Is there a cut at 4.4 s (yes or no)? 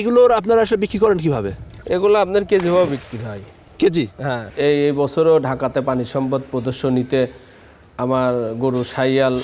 yes